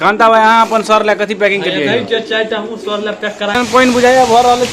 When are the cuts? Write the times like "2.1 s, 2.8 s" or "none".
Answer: 3.5 s